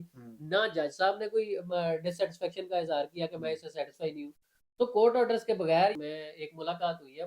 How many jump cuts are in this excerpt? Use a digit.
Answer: 1